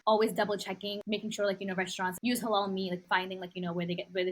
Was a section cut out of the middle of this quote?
yes; 3 cuts; at 1.0 s, 2.2 s, 3.0 s

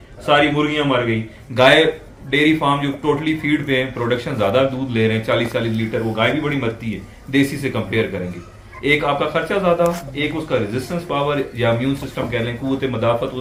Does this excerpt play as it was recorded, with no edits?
yes; 0 cuts

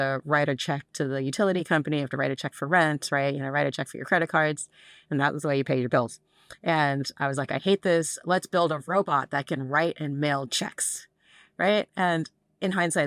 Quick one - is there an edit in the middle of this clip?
no; 0 cuts

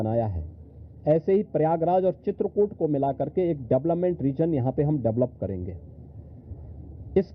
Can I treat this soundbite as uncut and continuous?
yes; 0 cuts

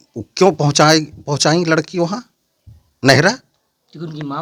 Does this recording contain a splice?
no; 0 cuts

